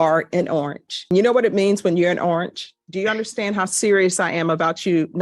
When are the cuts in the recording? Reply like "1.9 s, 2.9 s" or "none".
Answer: 2.8 s